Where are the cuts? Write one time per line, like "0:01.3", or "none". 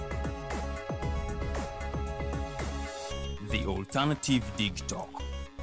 none